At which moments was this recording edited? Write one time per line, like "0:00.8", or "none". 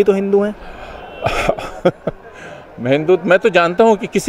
none